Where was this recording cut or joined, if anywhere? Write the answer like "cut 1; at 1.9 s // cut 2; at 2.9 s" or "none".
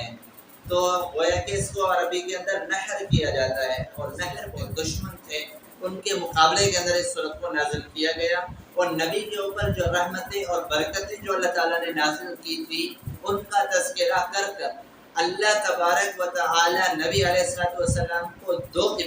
cut 1; at 4.3 s